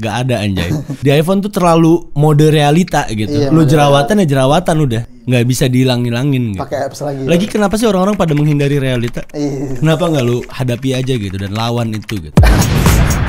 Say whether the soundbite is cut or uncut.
uncut